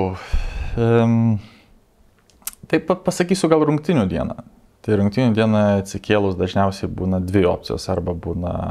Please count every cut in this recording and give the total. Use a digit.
0